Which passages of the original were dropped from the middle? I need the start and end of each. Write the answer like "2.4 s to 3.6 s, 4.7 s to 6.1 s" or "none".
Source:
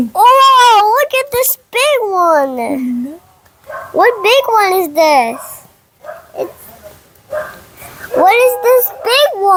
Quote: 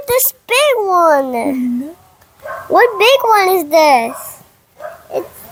none